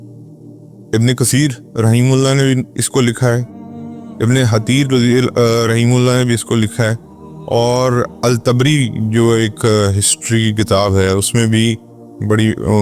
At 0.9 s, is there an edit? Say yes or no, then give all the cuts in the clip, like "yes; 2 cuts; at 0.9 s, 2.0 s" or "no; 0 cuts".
yes; 1 cut; at 0.9 s